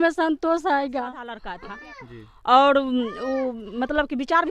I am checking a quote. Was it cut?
yes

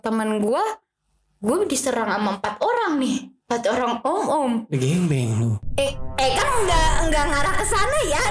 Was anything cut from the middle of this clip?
no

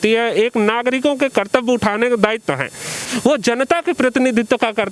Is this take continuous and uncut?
no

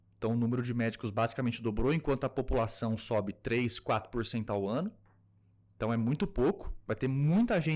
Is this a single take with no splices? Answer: yes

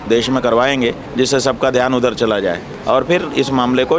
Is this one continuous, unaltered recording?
no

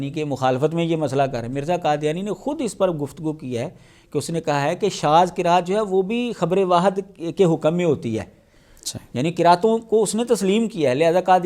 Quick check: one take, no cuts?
yes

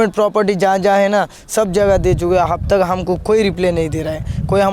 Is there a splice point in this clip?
no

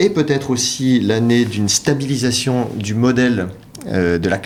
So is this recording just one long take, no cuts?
yes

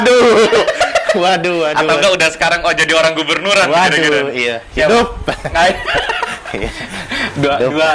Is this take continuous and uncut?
yes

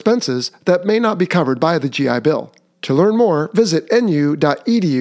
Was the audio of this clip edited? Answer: no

